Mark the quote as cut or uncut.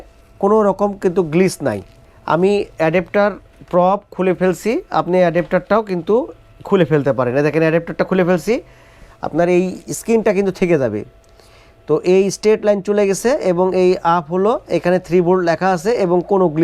uncut